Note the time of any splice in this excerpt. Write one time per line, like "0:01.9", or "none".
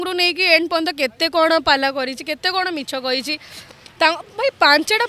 none